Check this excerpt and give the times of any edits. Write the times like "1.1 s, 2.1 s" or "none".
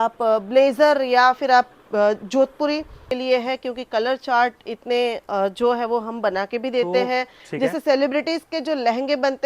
3.1 s, 7.4 s